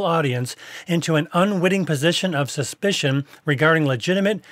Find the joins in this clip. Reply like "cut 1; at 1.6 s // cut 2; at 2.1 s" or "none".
none